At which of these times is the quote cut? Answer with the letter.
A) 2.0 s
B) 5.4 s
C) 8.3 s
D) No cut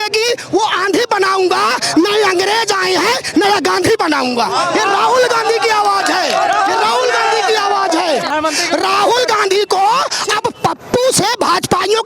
C